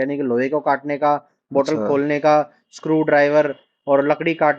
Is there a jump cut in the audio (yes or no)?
no